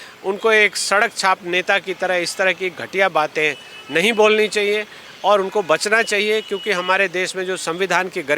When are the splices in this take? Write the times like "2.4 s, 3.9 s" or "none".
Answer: none